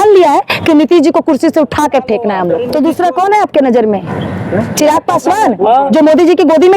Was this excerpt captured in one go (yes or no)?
no